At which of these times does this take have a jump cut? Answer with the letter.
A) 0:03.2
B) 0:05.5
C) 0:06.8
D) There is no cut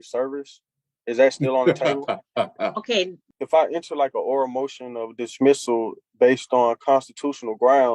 A